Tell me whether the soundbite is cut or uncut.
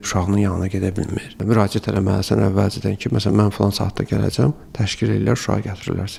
uncut